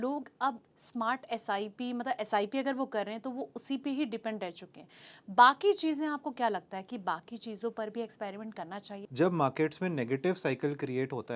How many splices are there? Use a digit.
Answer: 1